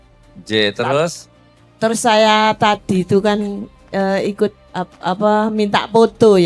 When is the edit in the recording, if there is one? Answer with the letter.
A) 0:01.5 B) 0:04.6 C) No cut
B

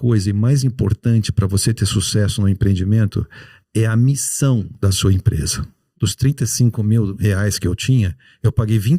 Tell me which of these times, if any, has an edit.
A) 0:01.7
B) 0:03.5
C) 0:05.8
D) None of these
C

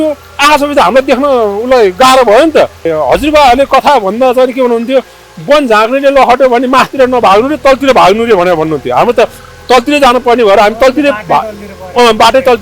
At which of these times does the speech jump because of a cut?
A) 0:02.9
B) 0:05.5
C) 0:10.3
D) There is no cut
A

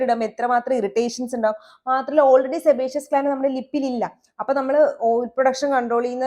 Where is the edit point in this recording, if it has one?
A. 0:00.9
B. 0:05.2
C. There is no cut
C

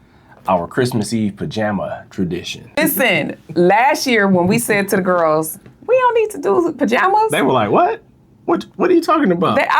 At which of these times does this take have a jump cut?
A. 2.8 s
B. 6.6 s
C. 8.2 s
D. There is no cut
A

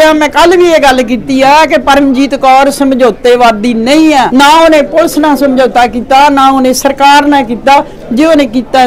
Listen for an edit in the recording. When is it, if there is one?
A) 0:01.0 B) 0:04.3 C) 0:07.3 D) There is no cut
B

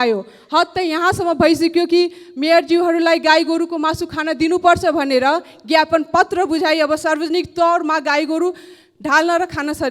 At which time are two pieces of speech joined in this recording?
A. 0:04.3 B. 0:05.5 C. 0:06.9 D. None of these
D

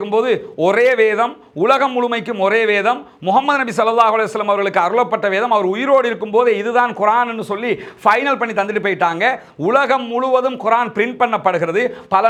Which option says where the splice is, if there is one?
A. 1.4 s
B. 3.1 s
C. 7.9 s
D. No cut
D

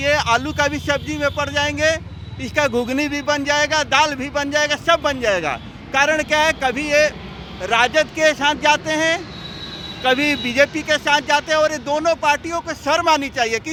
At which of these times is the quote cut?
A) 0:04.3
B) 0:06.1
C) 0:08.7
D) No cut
D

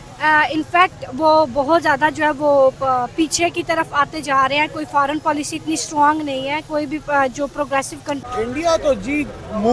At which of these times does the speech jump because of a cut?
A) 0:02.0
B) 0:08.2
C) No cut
B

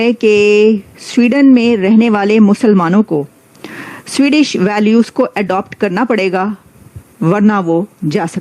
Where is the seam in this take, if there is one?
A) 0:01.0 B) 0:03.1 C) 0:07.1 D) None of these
A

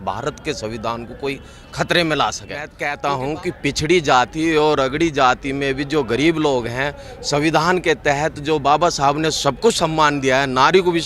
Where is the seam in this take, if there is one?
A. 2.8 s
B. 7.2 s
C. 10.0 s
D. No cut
A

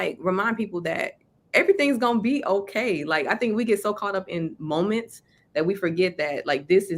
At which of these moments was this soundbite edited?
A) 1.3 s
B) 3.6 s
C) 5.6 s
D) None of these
D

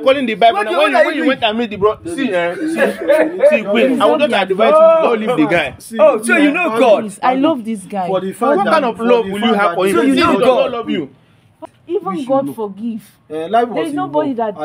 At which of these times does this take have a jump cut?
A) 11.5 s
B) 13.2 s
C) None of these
A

